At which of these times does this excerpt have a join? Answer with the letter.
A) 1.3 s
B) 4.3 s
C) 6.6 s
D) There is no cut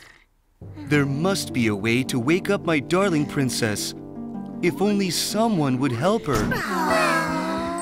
C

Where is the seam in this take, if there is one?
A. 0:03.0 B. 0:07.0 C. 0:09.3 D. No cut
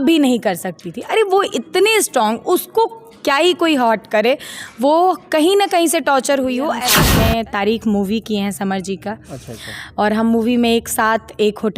B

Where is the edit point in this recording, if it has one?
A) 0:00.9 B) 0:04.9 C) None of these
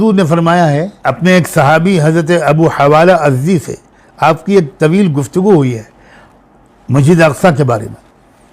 A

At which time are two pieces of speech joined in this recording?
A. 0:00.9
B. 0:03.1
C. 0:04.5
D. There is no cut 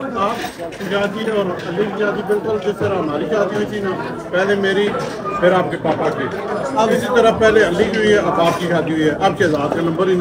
D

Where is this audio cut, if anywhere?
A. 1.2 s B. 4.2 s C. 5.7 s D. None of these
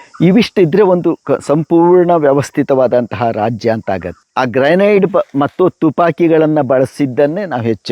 B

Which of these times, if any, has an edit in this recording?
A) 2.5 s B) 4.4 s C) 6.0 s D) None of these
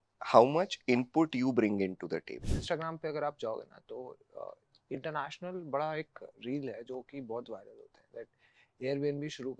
A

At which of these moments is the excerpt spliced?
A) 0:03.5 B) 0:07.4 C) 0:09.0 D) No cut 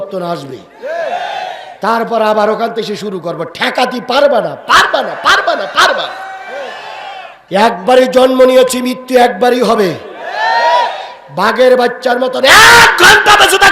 B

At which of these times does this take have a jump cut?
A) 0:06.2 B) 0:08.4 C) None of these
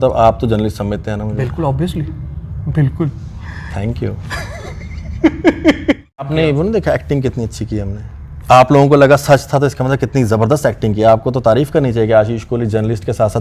A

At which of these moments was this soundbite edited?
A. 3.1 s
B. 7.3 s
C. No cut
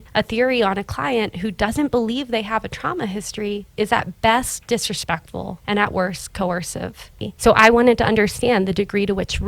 B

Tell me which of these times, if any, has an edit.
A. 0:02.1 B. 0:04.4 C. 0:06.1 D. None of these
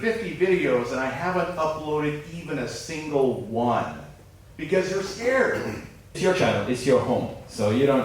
C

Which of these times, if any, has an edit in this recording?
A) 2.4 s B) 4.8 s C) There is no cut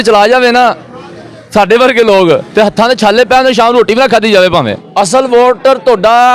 B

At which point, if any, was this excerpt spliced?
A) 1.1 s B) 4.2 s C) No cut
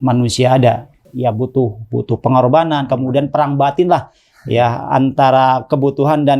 A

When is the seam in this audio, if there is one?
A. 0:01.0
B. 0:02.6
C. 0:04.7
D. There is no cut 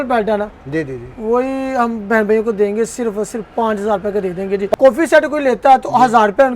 C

